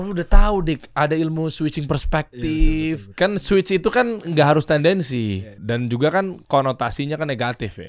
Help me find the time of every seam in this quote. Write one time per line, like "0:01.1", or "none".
0:03.1
0:05.5
0:06.4